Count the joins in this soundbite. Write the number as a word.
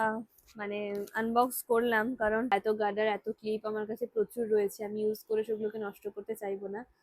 one